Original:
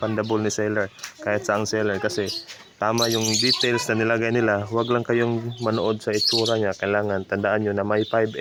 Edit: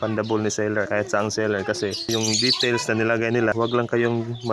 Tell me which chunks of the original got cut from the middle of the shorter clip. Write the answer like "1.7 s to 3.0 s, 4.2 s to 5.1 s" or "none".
0.9 s to 1.2 s, 2.4 s to 3.1 s, 4.5 s to 4.7 s